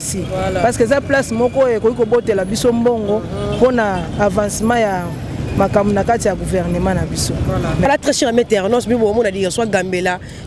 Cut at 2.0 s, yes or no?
no